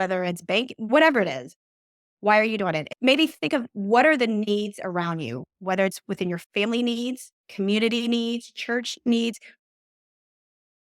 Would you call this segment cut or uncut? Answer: cut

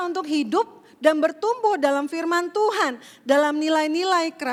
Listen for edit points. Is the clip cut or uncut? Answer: uncut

